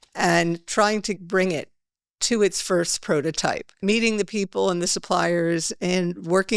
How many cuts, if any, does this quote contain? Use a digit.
2